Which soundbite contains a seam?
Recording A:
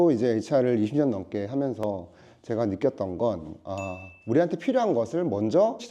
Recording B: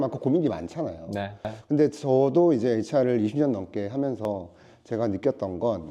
B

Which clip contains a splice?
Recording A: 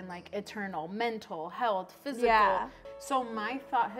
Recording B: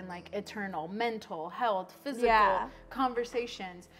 A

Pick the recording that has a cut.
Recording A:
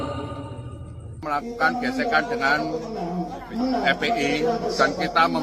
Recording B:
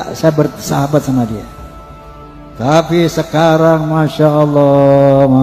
A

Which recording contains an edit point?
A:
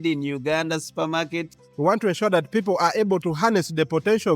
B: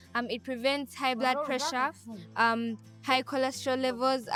A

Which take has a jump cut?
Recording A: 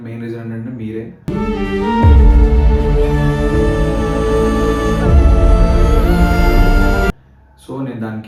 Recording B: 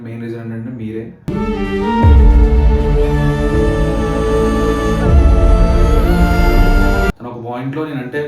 B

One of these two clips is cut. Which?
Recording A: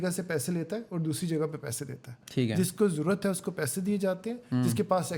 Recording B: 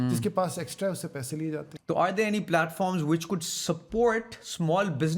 B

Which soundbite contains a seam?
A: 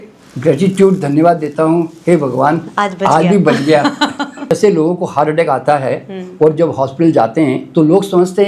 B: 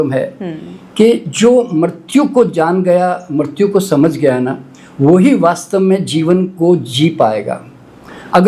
A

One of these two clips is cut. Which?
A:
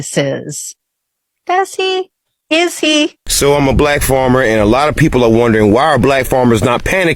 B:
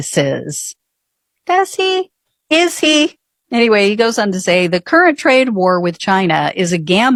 A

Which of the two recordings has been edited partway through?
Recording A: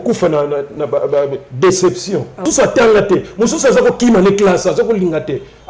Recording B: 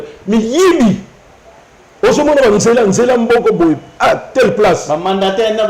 A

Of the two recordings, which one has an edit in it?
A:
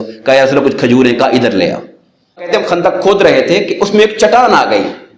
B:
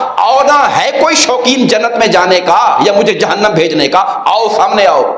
A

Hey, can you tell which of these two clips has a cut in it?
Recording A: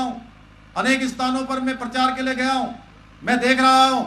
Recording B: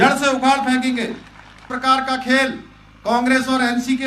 B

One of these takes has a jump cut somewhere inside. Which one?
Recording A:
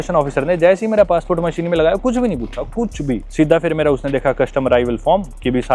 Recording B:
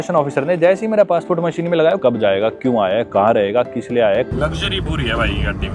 B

